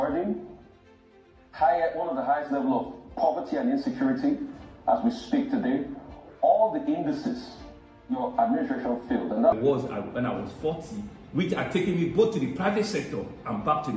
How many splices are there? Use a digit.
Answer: 1